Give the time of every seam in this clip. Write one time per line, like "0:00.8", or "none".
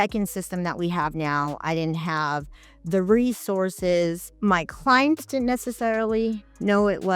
0:04.3